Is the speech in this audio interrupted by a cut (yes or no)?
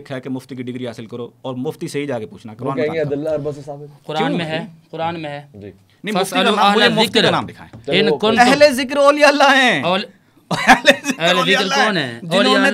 no